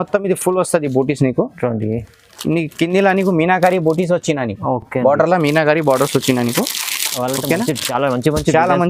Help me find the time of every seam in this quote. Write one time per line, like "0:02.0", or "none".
none